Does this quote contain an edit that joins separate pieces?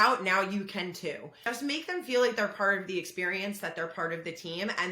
yes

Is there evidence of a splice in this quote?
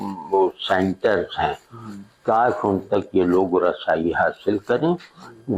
no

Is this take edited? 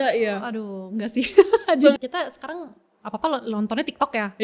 yes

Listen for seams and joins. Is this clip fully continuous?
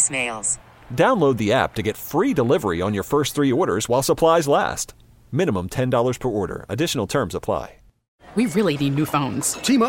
no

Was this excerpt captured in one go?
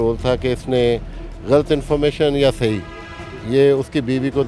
yes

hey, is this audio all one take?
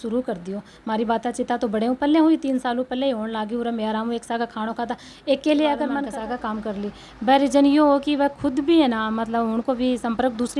no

